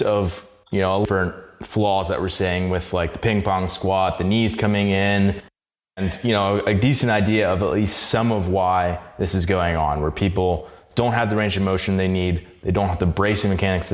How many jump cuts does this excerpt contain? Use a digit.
2